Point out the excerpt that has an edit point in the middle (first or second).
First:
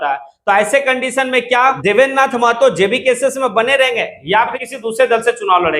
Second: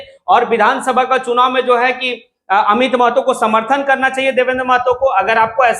first